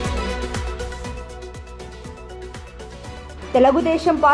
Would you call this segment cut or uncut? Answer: cut